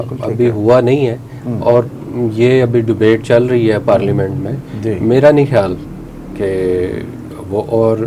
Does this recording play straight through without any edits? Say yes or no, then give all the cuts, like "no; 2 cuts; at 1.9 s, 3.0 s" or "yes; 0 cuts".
yes; 0 cuts